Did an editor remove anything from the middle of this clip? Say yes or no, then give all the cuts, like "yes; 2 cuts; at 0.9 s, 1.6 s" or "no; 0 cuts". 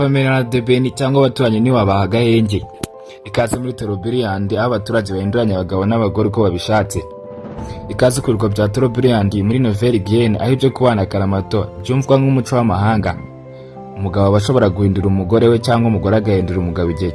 no; 0 cuts